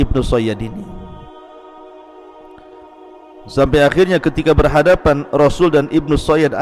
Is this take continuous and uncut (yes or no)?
no